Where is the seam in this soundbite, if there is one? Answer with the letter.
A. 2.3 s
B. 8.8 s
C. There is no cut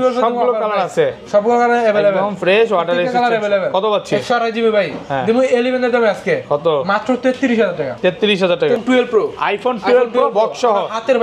B